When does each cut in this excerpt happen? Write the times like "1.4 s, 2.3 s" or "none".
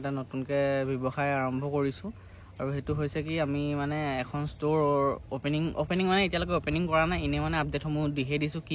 none